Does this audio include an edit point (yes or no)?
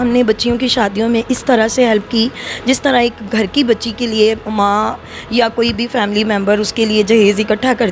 no